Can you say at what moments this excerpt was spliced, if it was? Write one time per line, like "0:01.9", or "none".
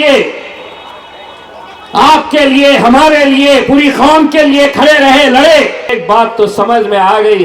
0:05.9

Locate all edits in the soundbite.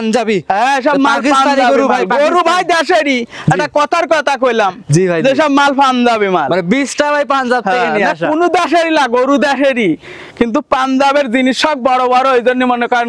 none

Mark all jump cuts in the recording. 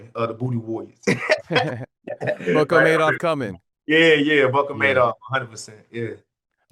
none

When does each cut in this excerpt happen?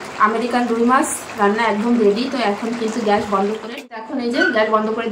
0:03.6

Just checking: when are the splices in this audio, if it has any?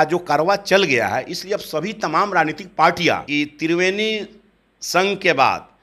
0:03.2

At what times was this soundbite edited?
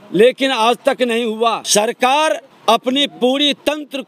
0:01.6
0:02.5

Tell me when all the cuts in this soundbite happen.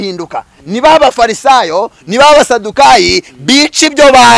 none

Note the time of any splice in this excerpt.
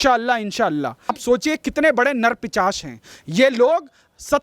0:01.2

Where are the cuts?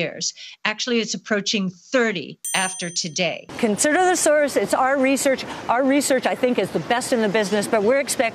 0:03.4

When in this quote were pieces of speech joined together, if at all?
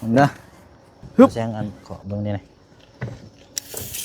0:01.3

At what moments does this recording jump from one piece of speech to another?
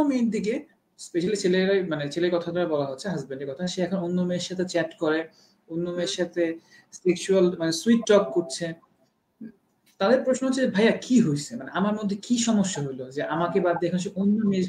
none

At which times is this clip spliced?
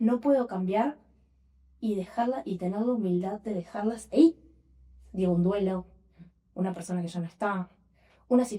none

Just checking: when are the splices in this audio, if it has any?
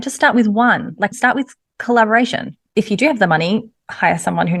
0:02.7

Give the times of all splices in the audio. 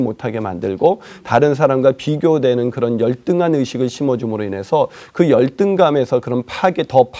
none

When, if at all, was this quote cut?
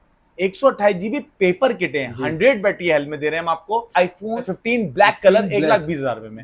0:04.3

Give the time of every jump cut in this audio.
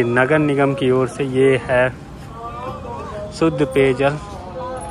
none

